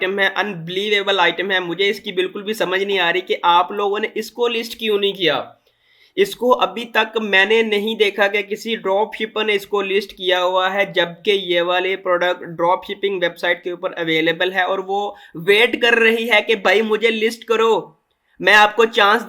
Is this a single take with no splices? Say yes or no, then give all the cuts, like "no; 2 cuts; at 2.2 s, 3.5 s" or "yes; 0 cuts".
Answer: yes; 0 cuts